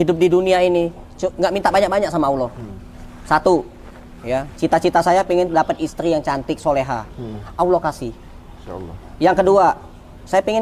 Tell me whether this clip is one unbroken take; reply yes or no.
yes